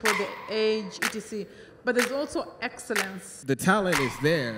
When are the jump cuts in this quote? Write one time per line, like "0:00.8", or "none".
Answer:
0:03.3